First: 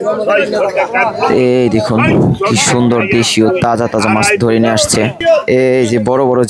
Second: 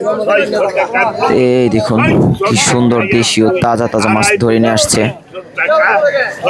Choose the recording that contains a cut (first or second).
first